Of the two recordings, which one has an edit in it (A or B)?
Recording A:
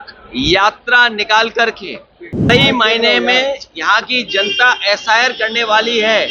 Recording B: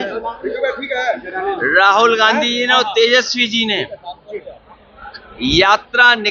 A